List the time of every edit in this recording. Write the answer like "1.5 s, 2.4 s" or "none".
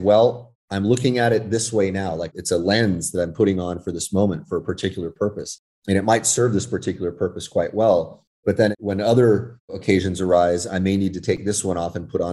8.5 s, 9.8 s